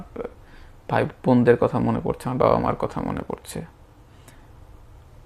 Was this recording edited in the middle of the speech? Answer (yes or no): no